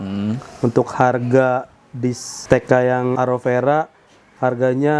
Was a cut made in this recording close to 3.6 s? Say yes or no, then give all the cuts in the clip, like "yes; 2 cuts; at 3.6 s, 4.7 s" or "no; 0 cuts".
no; 0 cuts